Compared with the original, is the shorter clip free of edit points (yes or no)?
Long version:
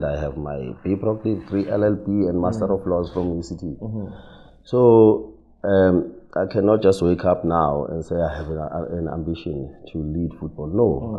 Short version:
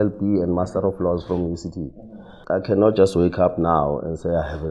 no